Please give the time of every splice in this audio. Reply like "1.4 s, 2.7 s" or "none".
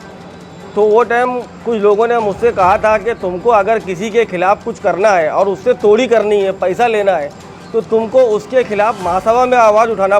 none